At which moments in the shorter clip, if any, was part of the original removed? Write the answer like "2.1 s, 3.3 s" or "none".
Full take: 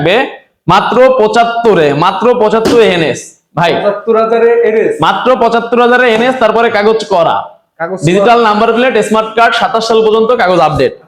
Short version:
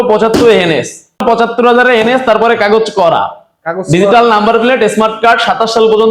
1.2 s